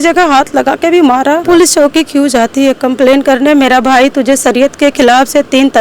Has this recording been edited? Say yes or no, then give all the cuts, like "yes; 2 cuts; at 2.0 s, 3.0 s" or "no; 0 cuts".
yes; 1 cut; at 1.4 s